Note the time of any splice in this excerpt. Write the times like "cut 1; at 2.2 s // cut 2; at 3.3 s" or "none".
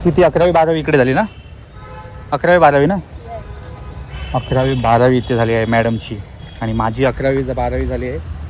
none